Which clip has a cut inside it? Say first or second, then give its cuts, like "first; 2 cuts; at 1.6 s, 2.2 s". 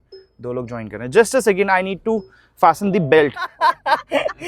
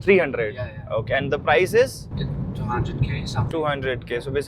first; 1 cut; at 3.5 s